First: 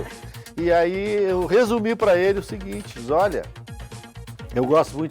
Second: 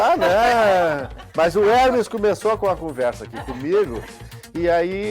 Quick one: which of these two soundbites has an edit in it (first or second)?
second